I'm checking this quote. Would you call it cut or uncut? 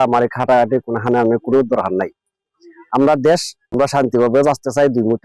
cut